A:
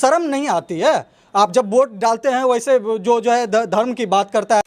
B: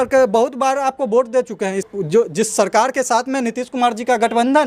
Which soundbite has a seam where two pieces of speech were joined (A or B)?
B